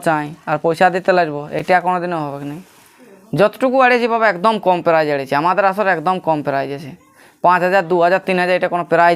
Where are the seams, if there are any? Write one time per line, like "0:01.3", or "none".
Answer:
none